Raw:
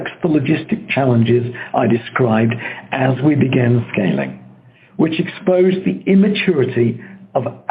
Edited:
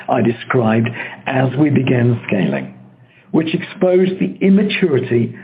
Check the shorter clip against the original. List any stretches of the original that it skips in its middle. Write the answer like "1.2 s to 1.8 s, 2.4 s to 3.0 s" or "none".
none